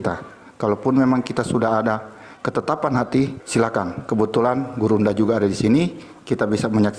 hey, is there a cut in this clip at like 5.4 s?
no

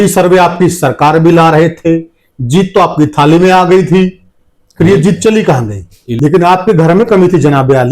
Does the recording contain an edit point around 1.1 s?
no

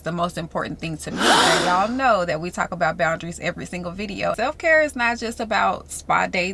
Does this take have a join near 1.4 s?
yes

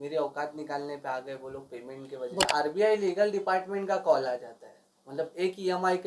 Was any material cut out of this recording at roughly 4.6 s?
no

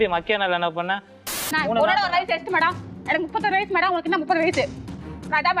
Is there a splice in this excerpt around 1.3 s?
yes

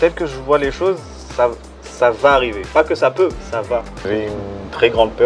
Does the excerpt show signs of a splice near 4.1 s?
yes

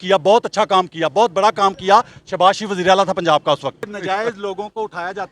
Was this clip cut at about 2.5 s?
no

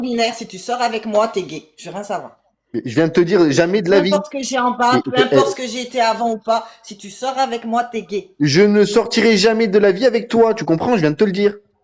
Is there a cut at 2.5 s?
no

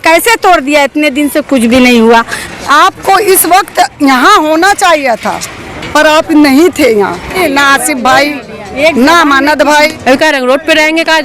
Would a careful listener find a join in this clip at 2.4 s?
yes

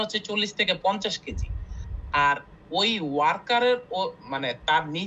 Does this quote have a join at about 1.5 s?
no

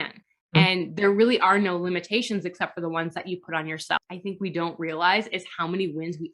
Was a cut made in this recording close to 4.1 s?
yes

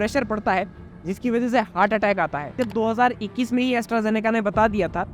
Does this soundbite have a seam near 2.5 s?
yes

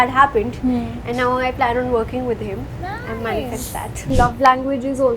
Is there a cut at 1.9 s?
no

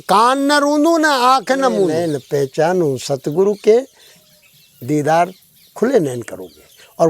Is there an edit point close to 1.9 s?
yes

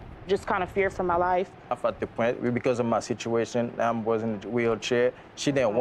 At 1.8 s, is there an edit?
yes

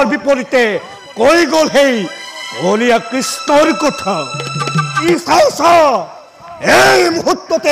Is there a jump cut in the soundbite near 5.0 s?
yes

